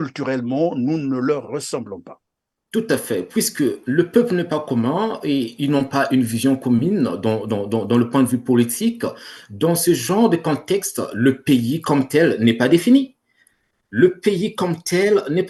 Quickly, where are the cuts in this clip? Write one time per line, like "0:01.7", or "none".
none